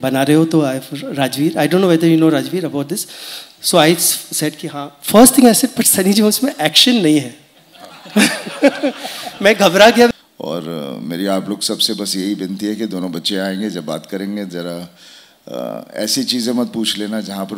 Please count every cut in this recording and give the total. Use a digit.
1